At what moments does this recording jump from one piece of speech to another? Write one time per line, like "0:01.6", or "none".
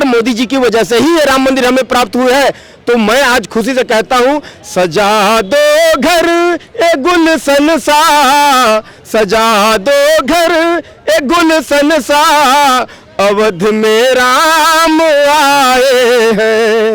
none